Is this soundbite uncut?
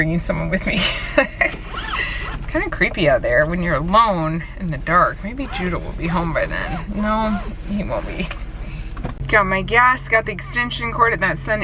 yes; 0 cuts

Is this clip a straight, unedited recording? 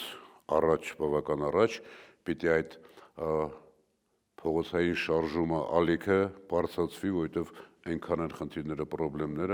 yes; 0 cuts

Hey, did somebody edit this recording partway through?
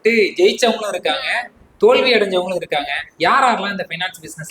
no; 0 cuts

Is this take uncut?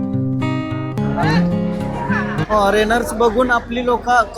no; 1 cut; at 1.0 s

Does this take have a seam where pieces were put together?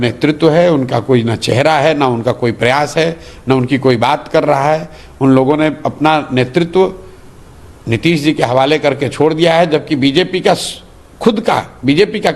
no; 0 cuts

